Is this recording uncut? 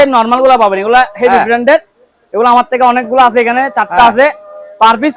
yes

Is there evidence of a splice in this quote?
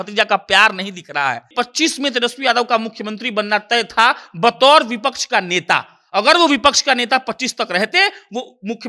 yes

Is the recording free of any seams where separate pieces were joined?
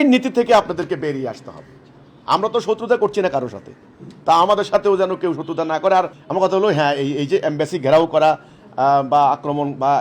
no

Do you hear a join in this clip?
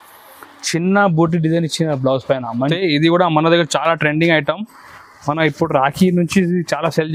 yes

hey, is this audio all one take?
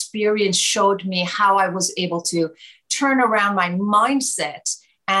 yes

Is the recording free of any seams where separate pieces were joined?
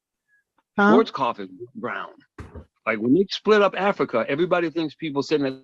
no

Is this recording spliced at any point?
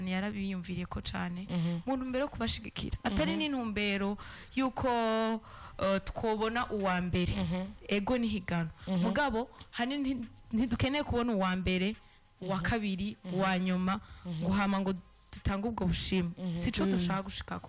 no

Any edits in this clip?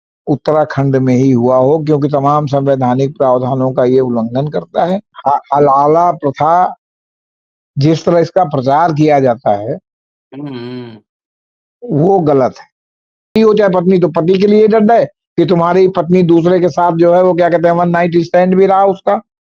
yes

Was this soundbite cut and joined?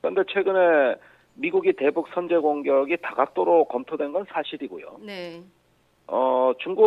no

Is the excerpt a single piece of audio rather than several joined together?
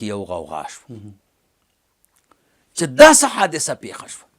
yes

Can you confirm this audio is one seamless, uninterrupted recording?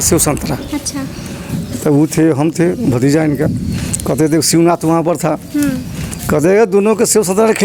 yes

